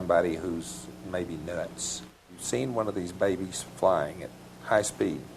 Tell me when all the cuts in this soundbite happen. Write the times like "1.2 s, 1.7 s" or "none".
2.2 s